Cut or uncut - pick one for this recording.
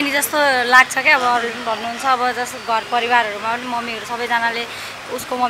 uncut